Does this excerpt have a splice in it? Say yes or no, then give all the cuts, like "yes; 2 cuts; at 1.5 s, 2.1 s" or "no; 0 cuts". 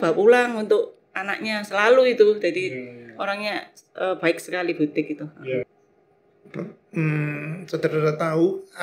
yes; 1 cut; at 5.8 s